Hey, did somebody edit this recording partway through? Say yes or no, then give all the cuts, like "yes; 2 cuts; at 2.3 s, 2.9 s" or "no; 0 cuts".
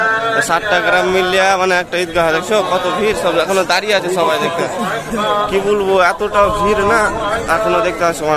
no; 0 cuts